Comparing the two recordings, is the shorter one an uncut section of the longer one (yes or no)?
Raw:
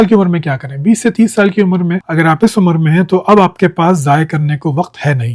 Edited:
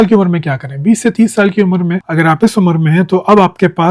yes